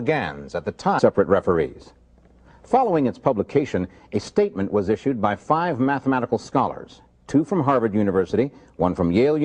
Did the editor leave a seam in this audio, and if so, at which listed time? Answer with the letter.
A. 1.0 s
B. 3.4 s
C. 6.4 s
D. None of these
D